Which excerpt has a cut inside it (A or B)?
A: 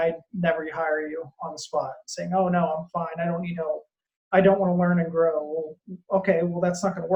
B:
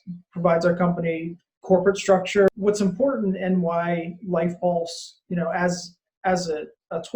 B